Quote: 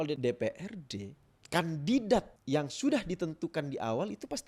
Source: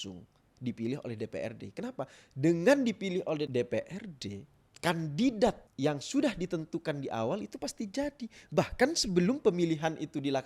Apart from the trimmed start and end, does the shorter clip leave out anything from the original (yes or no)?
no